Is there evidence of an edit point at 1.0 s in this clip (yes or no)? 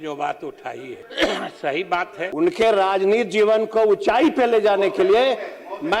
yes